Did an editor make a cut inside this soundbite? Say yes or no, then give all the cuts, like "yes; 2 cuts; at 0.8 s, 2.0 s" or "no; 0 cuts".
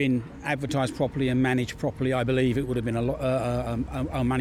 no; 0 cuts